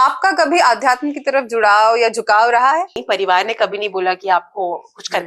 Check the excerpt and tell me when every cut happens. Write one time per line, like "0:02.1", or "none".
0:03.0